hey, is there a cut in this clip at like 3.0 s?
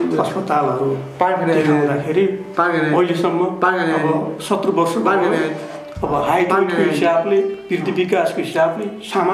no; 0 cuts

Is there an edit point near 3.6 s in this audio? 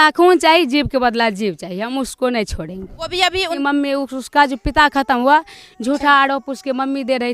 yes; 1 cut; at 3.6 s

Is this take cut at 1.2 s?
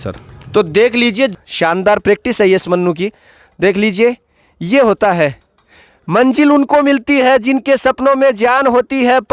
yes; 1 cut; at 1.2 s

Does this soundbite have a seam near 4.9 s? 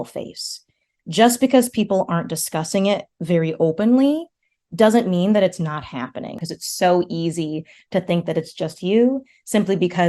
no; 1 cut; at 6.4 s

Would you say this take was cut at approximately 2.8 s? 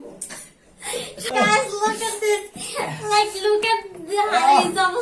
no; 1 cut; at 1.3 s

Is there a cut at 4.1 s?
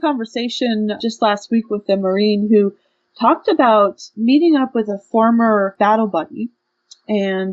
yes; 3 cuts; at 1.0 s, 4.1 s, 5.7 s

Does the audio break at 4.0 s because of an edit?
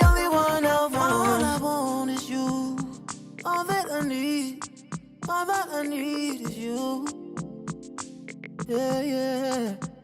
no; 1 cut; at 0.9 s

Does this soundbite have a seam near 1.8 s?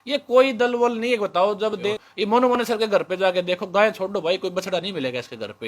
yes; 1 cut; at 1.8 s

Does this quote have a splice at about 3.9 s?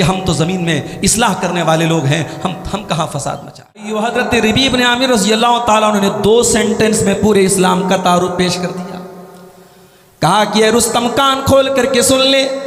yes; 1 cut; at 3.9 s

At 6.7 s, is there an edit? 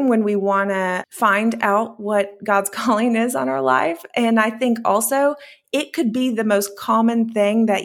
no; 1 cut; at 1.1 s

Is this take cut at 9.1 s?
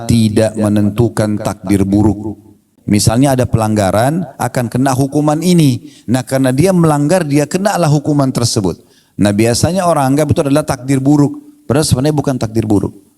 no; 1 cut; at 2.7 s

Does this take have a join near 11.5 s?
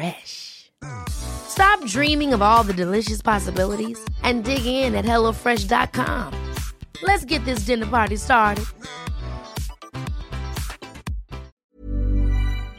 yes; 1 cut; at 11.5 s

